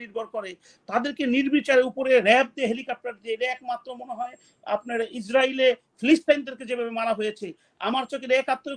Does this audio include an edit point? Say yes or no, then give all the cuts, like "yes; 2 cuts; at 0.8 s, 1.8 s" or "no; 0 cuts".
no; 0 cuts